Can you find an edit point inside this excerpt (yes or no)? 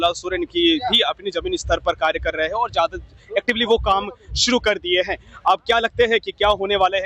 no